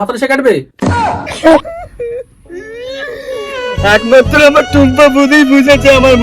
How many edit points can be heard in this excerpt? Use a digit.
1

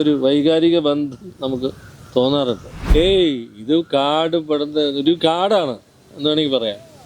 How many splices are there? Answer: 1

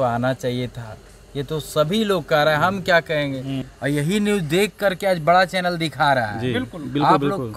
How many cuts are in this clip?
1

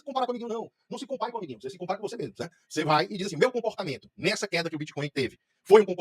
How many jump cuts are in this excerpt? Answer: 0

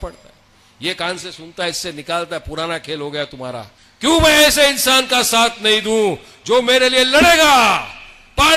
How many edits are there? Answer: 1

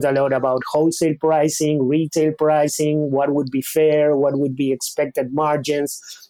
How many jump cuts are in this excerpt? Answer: 0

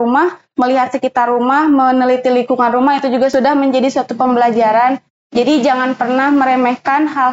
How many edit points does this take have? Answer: 1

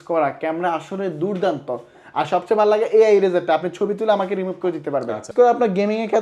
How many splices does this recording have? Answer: 1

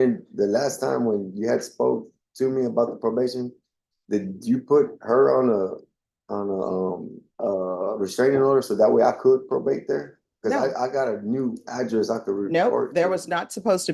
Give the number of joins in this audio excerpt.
1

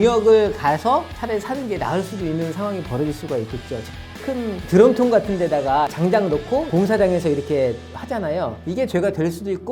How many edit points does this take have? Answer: 2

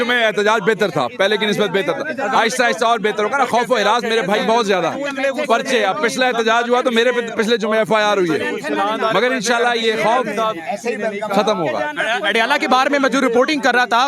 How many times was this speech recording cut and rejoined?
0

